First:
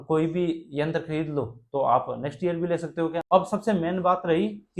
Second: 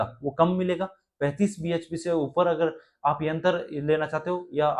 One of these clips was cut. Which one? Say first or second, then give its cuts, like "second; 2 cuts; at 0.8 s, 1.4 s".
first; 1 cut; at 3.3 s